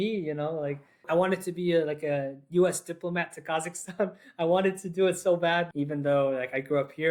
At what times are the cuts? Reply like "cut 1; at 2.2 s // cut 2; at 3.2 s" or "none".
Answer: cut 1; at 1.0 s // cut 2; at 5.7 s

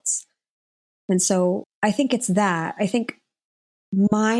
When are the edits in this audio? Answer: cut 1; at 1.7 s

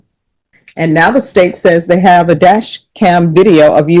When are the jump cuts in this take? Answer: none

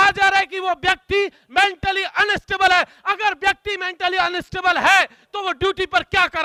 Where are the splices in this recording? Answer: none

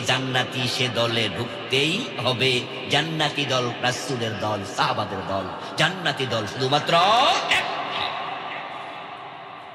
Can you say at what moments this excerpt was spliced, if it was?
none

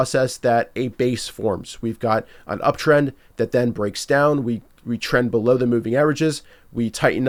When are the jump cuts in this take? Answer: none

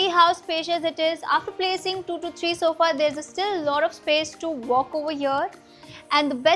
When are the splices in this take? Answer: none

